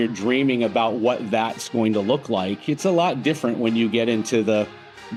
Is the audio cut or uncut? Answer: uncut